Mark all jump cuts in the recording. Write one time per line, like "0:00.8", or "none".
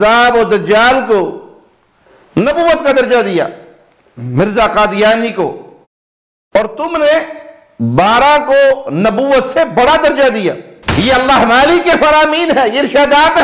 0:10.9

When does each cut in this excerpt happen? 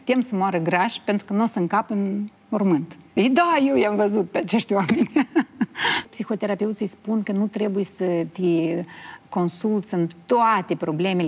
0:03.0
0:06.1

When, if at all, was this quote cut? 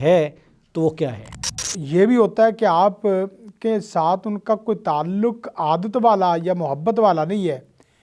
0:01.7

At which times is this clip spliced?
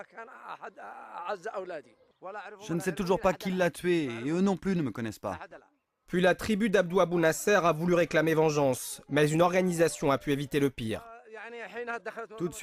none

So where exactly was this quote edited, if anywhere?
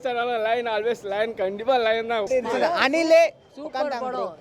0:02.3

